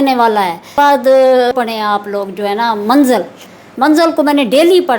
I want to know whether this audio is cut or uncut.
cut